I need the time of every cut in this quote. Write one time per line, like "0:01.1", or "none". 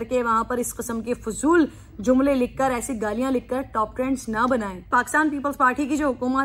0:04.9

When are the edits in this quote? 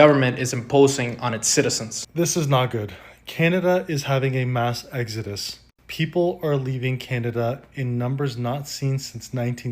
0:01.9

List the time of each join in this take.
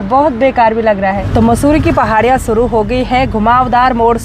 0:01.2

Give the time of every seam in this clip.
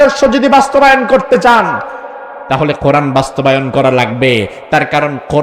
none

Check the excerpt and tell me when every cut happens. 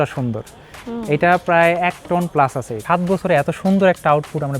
0:02.8

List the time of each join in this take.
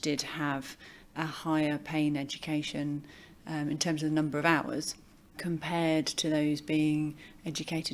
0:05.4

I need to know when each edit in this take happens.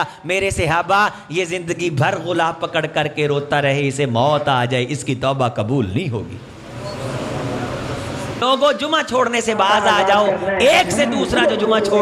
0:08.4

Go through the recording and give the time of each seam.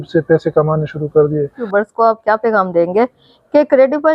0:01.6

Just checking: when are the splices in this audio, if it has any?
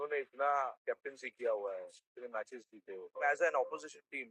0:00.8
0:03.1

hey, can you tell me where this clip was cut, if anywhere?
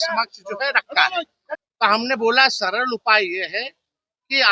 0:01.4

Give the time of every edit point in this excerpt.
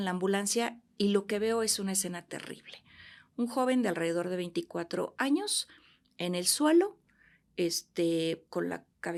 none

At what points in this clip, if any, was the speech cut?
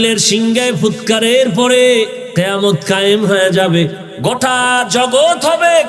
0:02.2
0:04.0

